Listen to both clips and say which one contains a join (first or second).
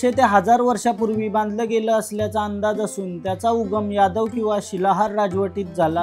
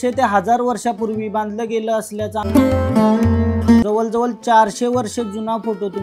second